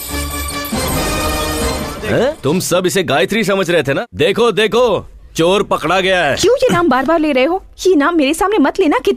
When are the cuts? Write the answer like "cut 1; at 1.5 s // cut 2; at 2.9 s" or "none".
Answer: cut 1; at 2.4 s // cut 2; at 4.1 s